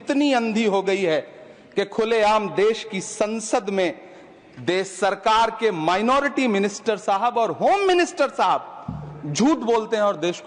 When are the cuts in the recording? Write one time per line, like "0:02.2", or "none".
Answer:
none